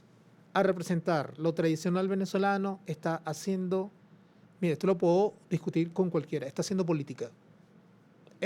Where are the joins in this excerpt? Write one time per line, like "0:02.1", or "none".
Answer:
none